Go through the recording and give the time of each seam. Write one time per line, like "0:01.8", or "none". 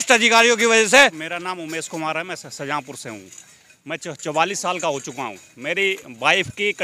0:01.2